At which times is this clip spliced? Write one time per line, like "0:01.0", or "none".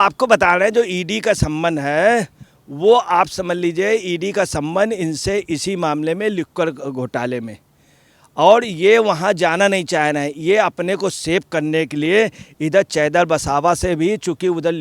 none